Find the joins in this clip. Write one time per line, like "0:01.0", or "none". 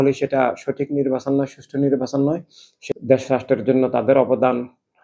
0:02.9